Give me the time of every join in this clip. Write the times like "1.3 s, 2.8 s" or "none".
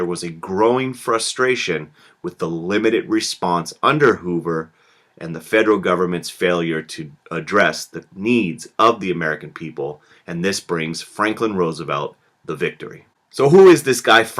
12.5 s